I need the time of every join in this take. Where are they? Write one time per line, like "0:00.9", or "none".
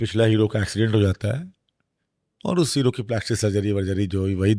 none